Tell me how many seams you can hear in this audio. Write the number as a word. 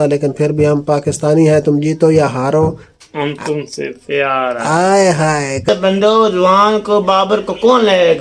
one